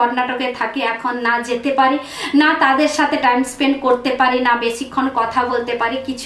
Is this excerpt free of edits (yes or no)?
yes